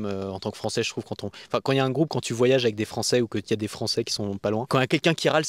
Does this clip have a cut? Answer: no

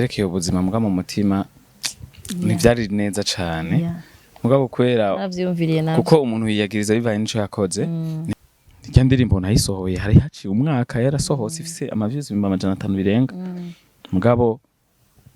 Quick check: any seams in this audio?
yes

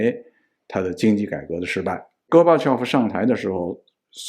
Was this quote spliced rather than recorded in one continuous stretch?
yes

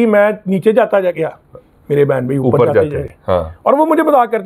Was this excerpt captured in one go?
yes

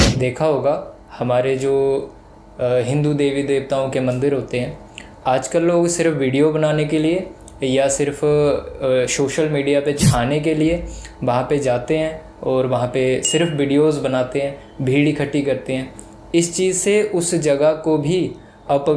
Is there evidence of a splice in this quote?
no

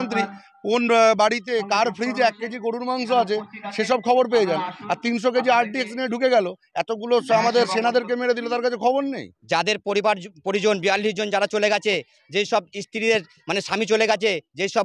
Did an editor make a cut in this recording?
yes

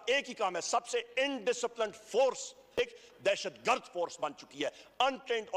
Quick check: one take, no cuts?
no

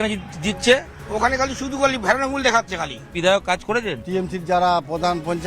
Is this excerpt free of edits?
no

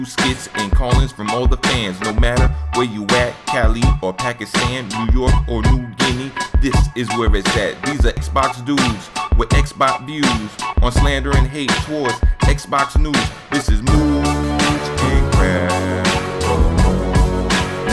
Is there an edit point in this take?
yes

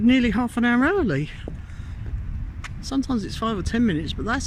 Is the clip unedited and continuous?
yes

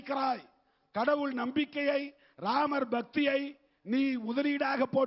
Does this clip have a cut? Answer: no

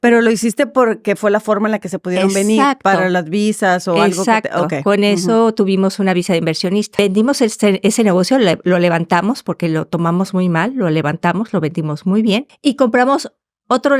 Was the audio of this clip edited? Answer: yes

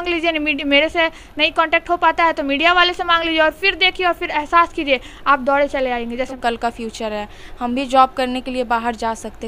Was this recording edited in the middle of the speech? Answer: yes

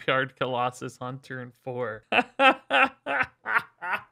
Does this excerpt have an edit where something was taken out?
yes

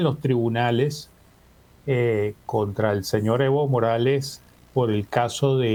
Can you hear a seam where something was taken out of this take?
no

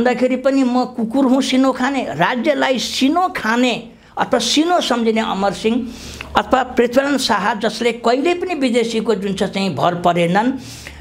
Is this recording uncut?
yes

